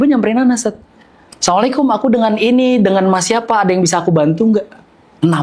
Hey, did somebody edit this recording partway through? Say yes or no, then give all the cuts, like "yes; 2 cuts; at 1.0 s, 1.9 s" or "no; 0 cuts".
no; 0 cuts